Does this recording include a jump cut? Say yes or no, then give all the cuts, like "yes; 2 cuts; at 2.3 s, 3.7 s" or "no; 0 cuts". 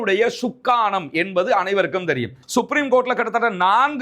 yes; 1 cut; at 2.4 s